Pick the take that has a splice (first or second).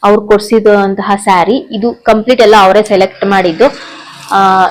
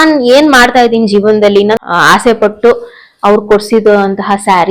second